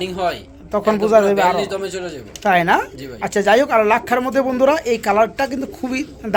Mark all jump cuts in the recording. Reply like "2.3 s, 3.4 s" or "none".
none